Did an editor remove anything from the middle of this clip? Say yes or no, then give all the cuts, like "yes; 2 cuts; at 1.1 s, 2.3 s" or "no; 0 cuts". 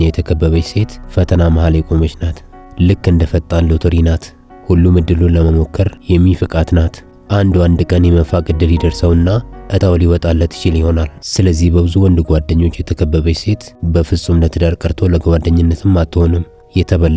no; 0 cuts